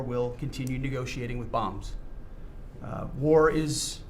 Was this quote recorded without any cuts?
yes; 0 cuts

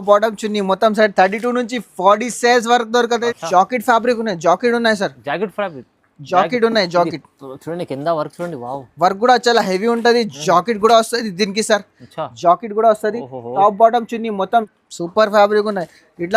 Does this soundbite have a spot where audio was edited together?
yes; 2 cuts; at 3.3 s, 14.7 s

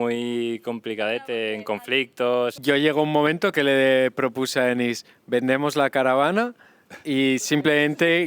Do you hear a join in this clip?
yes; 1 cut; at 2.5 s

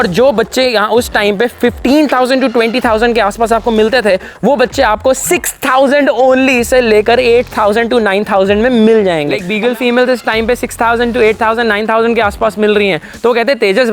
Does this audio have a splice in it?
yes; 1 cut; at 9.5 s

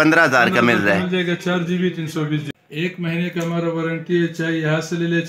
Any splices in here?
yes; 1 cut; at 2.5 s

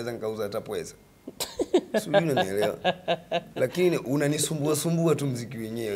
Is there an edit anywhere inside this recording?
no; 0 cuts

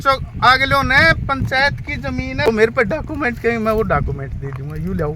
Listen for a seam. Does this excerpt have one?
yes; 1 cut; at 2.5 s

